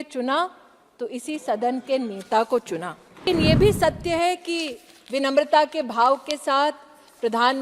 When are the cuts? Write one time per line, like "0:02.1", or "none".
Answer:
0:03.2